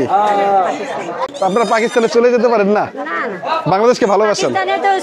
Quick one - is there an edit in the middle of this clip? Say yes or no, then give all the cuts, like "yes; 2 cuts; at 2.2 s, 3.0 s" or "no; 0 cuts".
yes; 1 cut; at 1.2 s